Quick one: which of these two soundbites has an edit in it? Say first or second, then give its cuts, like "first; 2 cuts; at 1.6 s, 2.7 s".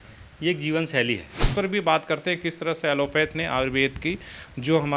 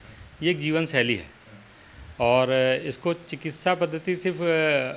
first; 1 cut; at 1.4 s